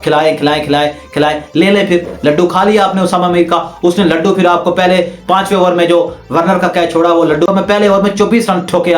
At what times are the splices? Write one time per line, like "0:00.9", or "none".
0:07.5